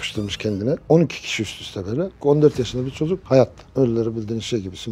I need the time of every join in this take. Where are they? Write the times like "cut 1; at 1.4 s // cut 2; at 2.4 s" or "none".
cut 1; at 3.6 s